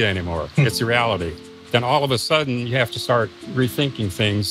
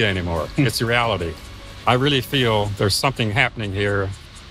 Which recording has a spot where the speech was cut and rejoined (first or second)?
second